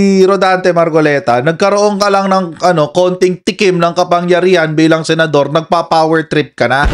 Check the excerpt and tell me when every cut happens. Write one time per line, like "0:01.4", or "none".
none

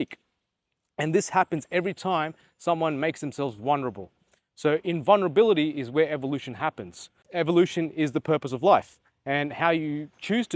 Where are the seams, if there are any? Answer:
0:07.2

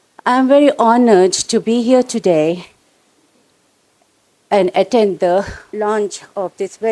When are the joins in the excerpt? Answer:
0:05.6

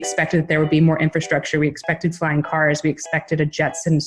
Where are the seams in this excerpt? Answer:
none

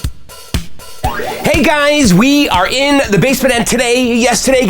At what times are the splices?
0:00.9

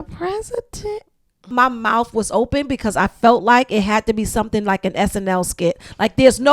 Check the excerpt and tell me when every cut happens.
0:01.5

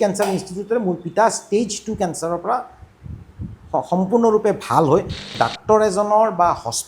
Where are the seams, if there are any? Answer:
0:05.3

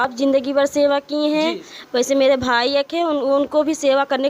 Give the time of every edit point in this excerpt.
none

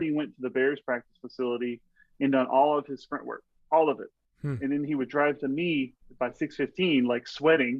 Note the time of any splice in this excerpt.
none

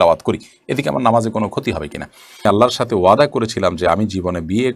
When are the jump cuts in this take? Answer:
0:02.4

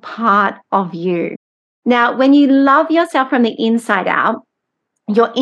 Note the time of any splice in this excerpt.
none

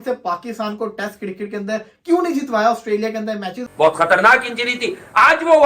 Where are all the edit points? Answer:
0:03.6

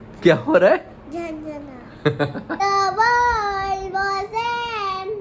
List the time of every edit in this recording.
0:02.6

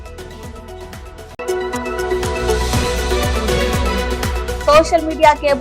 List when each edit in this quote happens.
0:01.2

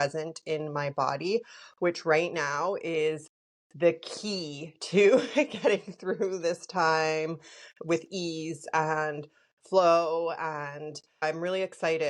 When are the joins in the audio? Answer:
none

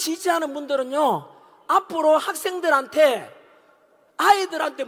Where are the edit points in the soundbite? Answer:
none

